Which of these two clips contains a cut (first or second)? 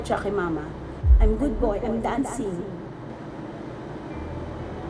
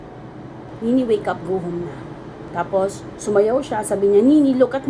second